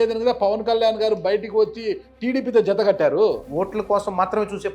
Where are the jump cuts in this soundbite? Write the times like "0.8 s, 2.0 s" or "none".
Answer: 3.5 s